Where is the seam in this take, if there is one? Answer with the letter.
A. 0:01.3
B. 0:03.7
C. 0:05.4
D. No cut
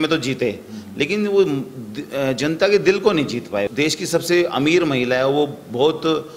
B